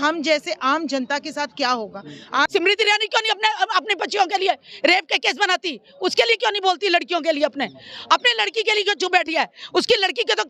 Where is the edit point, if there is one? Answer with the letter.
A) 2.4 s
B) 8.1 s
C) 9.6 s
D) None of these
A